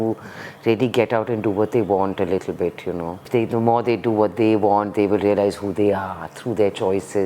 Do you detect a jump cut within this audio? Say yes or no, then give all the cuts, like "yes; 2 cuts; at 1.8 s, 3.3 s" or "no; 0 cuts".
yes; 1 cut; at 3.3 s